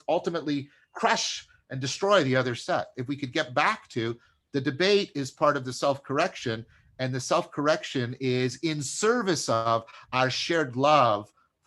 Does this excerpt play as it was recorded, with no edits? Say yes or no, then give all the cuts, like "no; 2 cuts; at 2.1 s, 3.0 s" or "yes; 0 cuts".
no; 1 cut; at 4.3 s